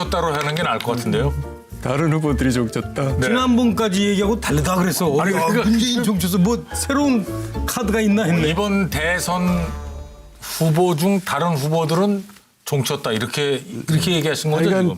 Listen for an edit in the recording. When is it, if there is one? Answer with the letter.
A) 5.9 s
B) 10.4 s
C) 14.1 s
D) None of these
C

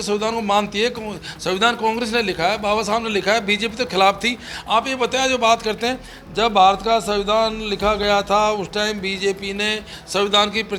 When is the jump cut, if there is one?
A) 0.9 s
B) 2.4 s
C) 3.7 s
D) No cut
D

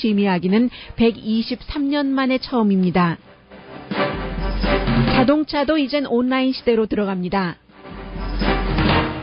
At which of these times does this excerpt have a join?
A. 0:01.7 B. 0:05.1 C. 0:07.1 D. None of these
B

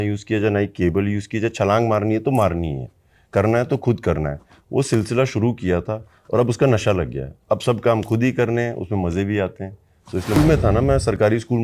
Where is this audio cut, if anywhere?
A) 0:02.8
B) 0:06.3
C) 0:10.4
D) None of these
C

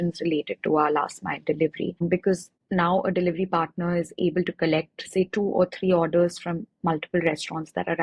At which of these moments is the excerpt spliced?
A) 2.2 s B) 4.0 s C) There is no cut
A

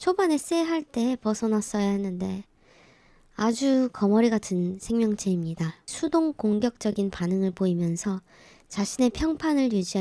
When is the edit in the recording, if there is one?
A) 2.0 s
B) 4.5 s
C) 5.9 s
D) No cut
C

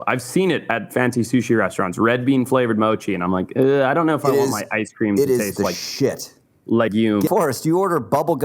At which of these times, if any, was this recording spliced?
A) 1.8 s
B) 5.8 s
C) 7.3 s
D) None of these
C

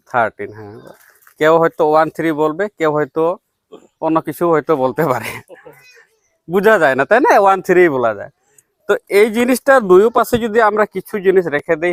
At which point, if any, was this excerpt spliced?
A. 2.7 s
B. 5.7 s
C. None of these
C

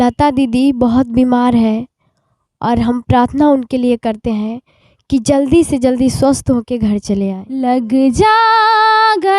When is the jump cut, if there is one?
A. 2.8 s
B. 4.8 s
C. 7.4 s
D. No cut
C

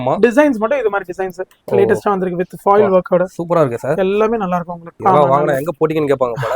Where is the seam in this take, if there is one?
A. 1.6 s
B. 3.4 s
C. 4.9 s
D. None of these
C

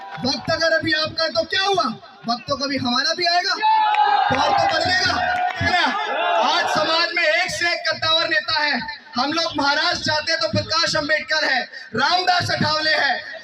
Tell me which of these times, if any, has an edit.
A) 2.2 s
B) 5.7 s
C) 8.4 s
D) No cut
B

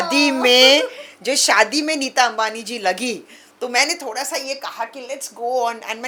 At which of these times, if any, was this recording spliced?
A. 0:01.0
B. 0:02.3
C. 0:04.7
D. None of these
D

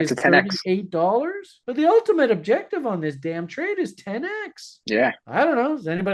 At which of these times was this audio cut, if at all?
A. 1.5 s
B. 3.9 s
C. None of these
A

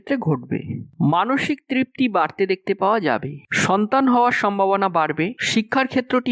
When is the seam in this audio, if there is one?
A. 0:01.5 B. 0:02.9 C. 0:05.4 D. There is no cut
C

